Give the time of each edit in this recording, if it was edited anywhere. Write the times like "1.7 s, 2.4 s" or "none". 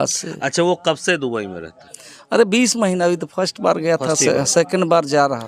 none